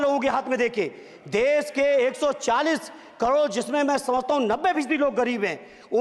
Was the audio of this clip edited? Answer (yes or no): no